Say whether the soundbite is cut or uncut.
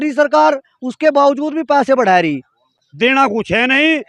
cut